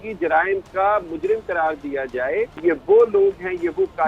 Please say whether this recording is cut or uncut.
cut